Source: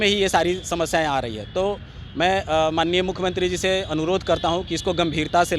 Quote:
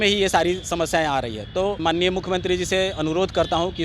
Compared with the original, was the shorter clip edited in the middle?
yes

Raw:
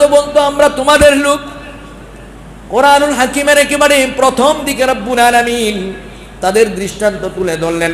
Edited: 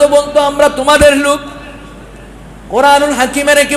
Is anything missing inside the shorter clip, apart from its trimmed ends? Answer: no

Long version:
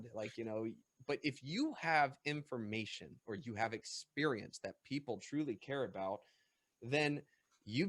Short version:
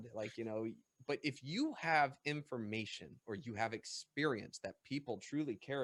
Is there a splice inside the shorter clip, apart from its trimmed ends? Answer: no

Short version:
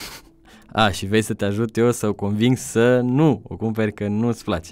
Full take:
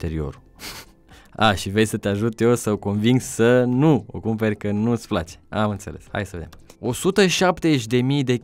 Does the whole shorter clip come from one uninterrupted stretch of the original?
yes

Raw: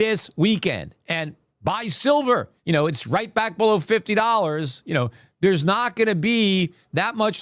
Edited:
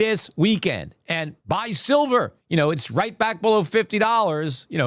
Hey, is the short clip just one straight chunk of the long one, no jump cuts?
no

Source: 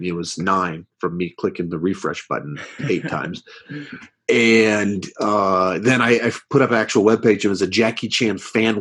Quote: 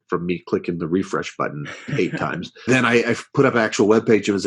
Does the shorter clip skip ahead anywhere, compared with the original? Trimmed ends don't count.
yes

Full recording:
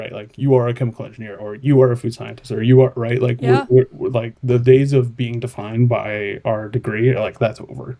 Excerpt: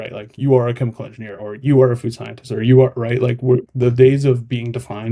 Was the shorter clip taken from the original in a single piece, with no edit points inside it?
no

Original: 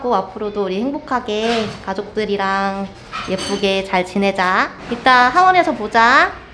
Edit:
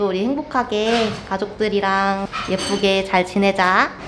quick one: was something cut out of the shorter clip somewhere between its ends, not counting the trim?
yes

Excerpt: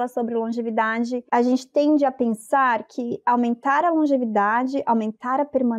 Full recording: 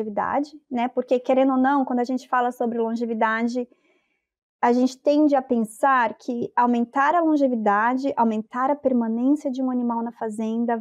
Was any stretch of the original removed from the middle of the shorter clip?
yes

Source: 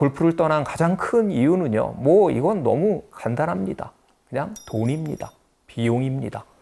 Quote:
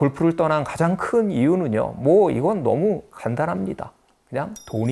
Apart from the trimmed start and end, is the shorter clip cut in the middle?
no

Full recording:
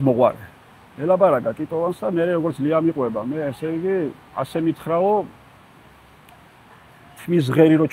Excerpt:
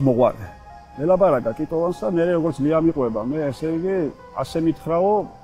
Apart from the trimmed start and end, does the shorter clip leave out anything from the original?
no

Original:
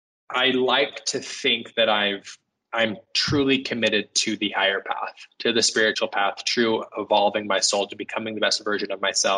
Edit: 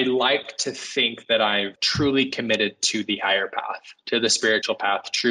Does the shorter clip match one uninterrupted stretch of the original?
no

